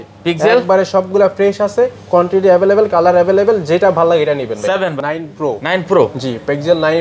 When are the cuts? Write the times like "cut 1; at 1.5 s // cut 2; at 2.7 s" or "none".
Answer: cut 1; at 4.9 s